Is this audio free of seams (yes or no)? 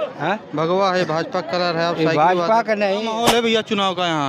no